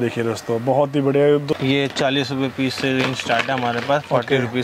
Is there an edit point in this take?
yes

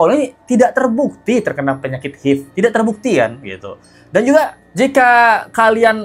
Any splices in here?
no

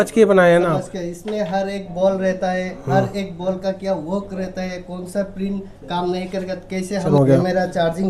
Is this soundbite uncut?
no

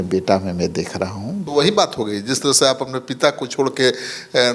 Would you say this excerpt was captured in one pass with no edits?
no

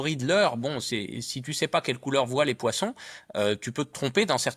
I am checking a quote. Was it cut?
no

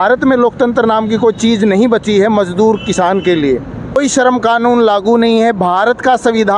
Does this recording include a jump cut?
yes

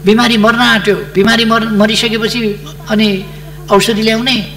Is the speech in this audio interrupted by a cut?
no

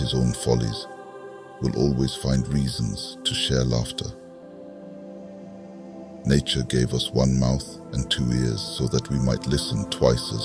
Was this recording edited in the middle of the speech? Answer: no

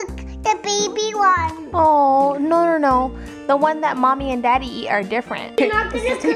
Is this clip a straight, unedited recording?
no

